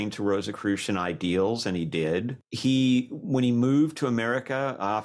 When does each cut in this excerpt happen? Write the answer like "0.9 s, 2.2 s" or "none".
2.4 s